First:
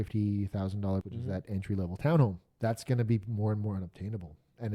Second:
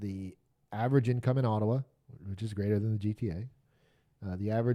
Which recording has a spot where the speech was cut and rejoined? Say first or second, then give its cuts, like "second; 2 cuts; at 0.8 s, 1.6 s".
first; 2 cuts; at 1.0 s, 2.5 s